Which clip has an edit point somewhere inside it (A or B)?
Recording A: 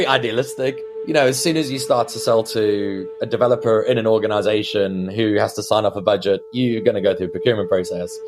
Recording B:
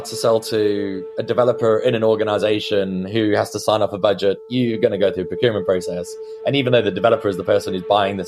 A